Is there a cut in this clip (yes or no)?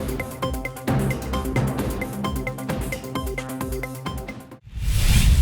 yes